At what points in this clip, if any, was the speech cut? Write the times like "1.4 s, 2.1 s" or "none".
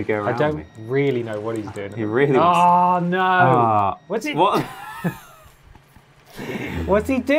none